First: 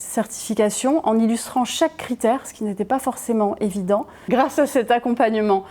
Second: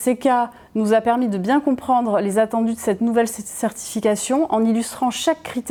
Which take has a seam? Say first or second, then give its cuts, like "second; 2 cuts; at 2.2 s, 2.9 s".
first; 1 cut; at 4.1 s